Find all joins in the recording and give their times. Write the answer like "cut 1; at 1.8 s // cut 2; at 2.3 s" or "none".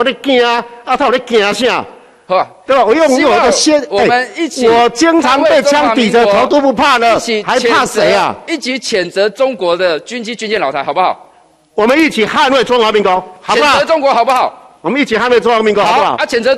none